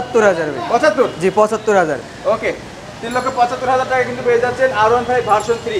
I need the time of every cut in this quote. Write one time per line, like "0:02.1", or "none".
none